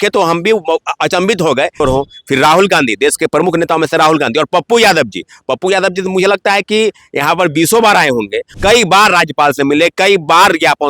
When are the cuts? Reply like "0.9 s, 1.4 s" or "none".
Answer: 1.8 s, 8.5 s